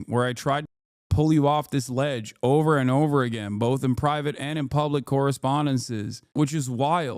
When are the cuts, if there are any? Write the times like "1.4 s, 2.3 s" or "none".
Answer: 6.2 s